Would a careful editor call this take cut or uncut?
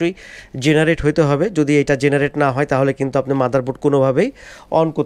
uncut